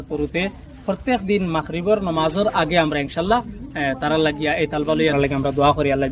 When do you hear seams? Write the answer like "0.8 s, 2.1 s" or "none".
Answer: 5.1 s